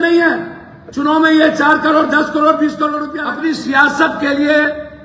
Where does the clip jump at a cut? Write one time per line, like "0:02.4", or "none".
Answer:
0:03.1